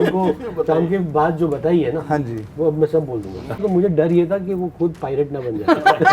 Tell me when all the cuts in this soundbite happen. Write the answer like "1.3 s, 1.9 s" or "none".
3.6 s